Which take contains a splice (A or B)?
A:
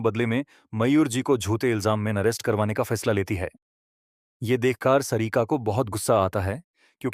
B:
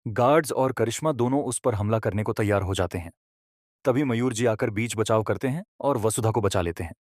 B